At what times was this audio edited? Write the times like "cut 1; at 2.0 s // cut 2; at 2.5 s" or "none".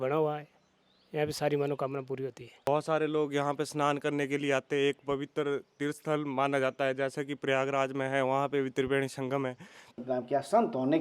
cut 1; at 2.7 s // cut 2; at 10.0 s